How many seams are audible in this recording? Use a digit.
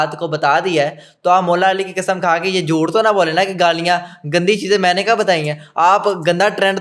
0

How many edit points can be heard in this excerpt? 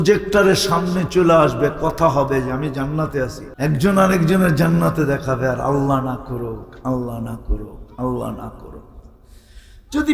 1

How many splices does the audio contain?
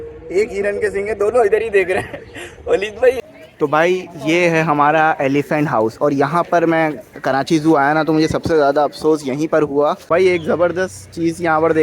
2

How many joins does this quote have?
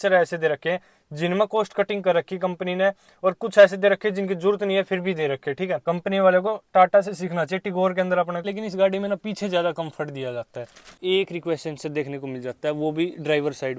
3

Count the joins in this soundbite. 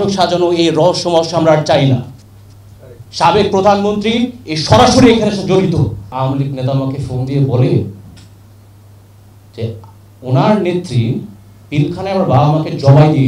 1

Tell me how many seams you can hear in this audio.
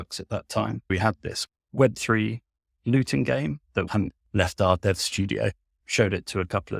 1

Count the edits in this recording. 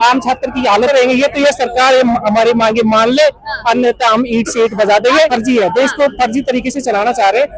2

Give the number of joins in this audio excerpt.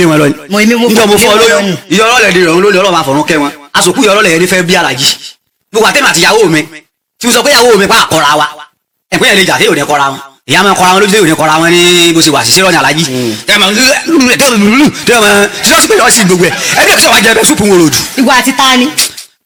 0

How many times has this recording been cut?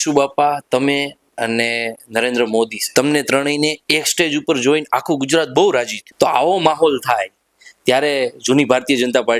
2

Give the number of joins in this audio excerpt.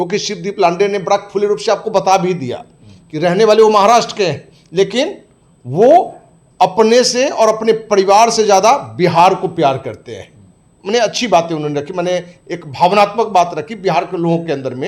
0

